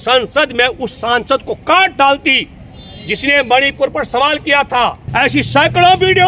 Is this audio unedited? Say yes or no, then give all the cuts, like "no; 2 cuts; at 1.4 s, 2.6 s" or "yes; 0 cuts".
no; 1 cut; at 5.0 s